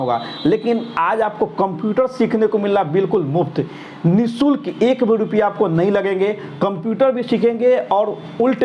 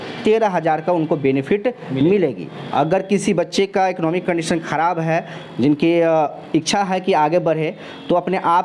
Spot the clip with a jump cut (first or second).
second